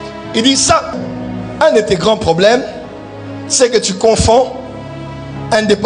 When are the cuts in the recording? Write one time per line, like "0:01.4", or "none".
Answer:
0:00.9